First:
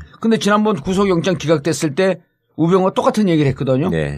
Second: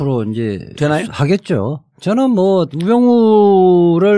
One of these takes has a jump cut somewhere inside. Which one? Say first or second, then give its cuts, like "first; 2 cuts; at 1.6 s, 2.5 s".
first; 1 cut; at 1.1 s